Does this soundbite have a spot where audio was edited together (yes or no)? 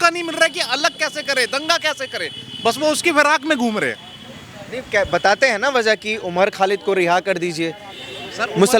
no